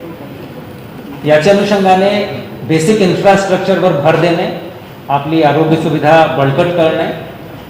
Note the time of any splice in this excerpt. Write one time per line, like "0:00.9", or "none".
0:05.3